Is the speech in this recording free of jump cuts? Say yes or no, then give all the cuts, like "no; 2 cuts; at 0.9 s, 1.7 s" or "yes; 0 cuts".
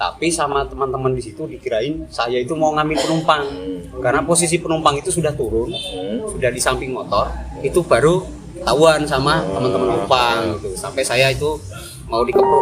yes; 0 cuts